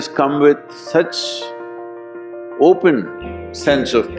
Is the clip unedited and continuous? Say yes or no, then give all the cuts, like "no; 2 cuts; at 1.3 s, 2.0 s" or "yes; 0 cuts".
yes; 0 cuts